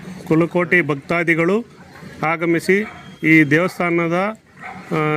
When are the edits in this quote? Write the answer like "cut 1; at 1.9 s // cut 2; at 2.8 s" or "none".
none